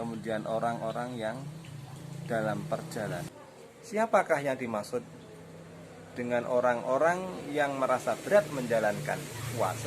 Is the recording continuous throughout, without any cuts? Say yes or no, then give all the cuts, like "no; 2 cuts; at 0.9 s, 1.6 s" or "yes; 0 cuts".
no; 1 cut; at 3.3 s